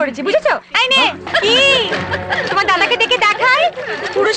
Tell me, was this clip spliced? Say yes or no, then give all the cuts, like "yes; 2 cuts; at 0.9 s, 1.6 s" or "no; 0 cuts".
yes; 1 cut; at 1.3 s